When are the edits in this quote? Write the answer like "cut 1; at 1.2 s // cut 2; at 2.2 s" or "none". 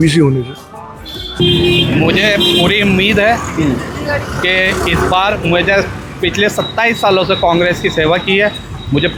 none